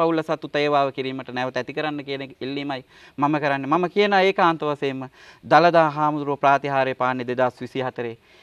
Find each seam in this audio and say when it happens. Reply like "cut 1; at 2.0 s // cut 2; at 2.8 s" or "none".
none